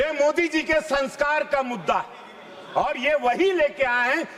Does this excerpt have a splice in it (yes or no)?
no